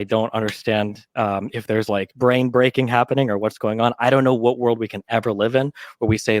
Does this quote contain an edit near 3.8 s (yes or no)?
yes